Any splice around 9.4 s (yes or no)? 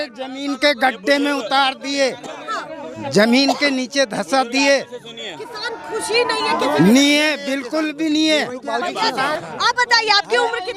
yes